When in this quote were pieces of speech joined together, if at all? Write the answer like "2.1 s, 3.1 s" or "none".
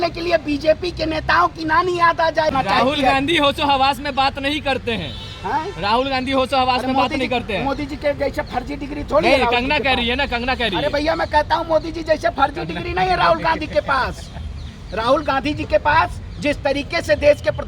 2.5 s